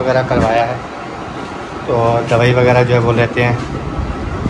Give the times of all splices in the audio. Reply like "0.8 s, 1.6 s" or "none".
none